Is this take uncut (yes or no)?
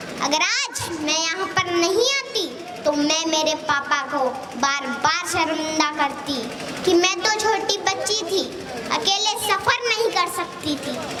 yes